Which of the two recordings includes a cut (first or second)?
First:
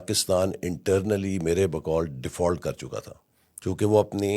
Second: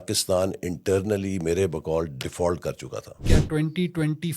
second